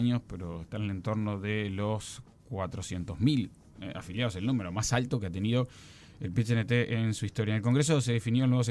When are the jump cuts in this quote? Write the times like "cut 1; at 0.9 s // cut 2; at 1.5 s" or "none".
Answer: none